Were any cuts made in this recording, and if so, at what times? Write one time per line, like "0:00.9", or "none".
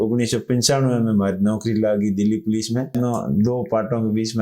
0:02.9